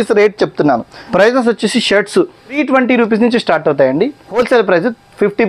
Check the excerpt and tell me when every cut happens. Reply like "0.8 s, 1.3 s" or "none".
1.0 s, 2.6 s, 4.5 s